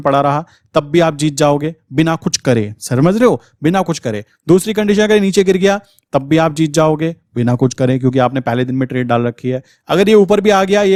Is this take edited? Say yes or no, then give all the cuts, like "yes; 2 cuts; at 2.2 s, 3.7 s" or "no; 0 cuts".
no; 0 cuts